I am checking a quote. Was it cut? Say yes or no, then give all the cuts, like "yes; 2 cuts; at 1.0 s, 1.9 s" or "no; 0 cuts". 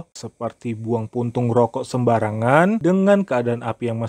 no; 0 cuts